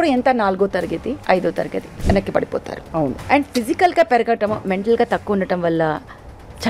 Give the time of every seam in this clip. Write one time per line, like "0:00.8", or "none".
0:01.2
0:01.9
0:03.2